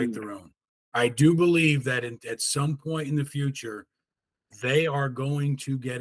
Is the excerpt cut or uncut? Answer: uncut